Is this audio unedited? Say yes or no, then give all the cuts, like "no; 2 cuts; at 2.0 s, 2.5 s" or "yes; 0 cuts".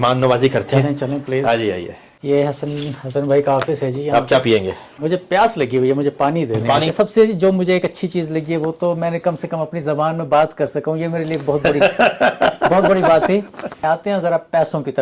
no; 2 cuts; at 6.9 s, 13.7 s